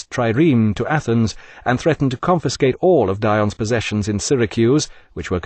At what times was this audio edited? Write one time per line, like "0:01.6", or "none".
0:01.2